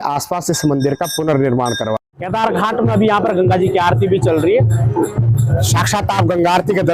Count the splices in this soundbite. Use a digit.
1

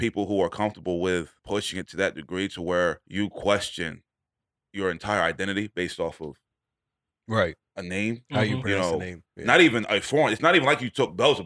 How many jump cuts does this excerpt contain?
2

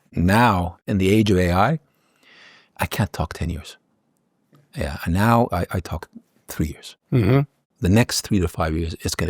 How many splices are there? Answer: 1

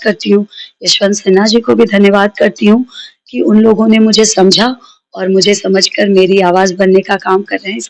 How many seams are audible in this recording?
0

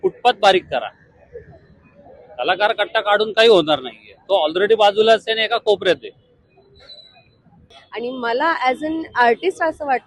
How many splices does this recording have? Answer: 1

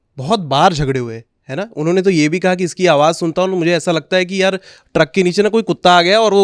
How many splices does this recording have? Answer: 0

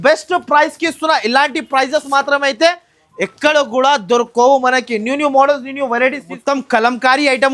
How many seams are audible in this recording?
1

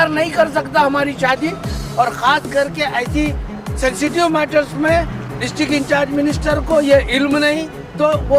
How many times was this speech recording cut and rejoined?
1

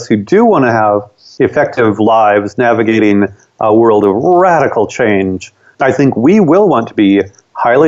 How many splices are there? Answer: 0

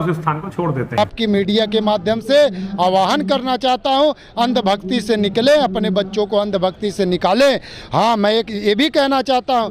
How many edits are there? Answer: 1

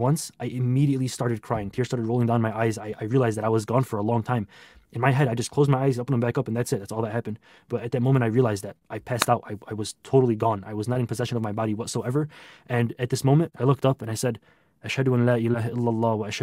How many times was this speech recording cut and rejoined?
1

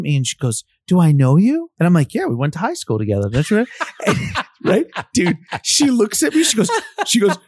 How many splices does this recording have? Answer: 1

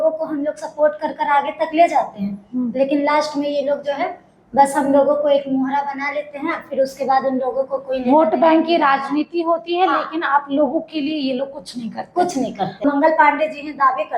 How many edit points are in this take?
1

